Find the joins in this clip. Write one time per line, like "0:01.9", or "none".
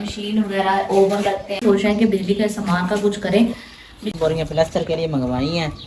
0:01.6
0:03.9

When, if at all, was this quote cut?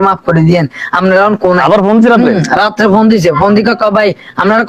none

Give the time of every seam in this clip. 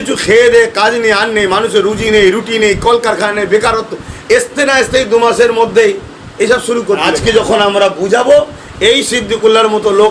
0:07.0

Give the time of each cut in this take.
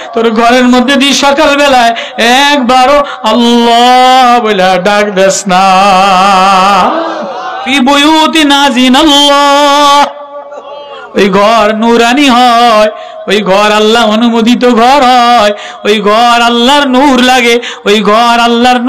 0:07.6

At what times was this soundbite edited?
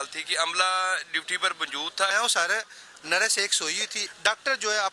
0:02.1
0:03.9

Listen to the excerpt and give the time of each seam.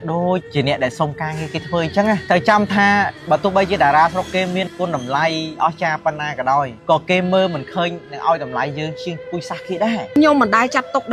0:02.2
0:04.7
0:10.2

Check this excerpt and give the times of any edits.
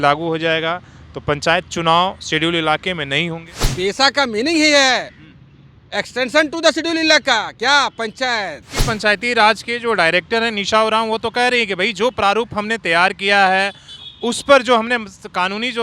0:03.6
0:08.8

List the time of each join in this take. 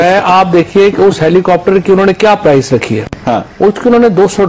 none

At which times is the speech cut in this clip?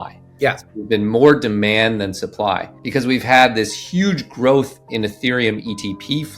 0:02.7

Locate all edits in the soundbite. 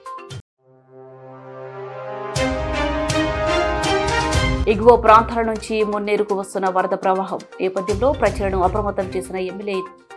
0:04.6

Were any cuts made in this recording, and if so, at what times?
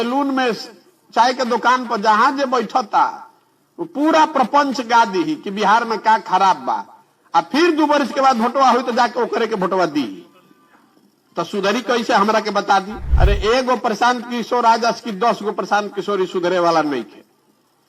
0:13.0

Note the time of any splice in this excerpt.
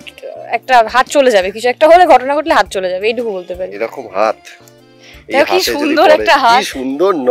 0:03.7

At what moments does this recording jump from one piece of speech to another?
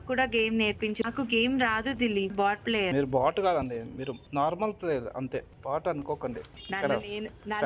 0:01.1
0:02.7

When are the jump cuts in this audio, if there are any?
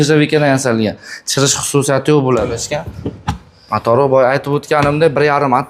0:02.6

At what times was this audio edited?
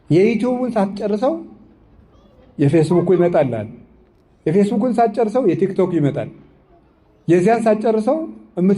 none

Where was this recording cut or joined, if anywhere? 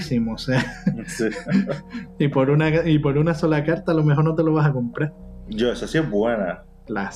none

